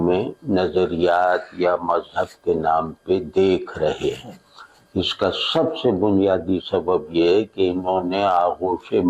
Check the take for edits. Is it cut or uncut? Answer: uncut